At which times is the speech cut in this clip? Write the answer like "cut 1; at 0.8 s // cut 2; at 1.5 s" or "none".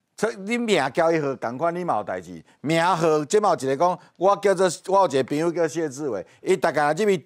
none